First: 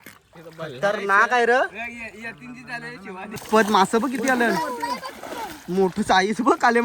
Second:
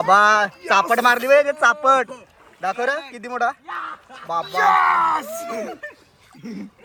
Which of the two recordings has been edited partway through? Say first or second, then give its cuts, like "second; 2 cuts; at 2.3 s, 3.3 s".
first; 1 cut; at 3.4 s